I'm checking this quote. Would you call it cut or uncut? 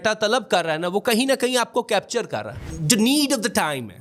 cut